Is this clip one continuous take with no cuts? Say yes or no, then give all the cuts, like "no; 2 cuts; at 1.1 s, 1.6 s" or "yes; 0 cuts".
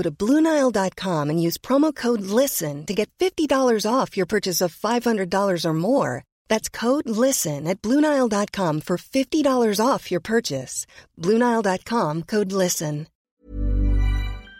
no; 1 cut; at 13.1 s